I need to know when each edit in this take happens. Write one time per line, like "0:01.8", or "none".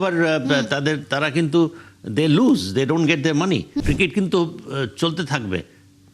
0:03.7